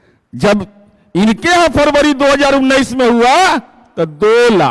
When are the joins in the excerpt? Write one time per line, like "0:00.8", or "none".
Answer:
none